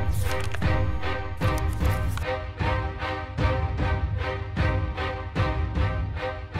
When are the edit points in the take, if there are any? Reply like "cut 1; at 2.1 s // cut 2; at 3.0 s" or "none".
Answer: none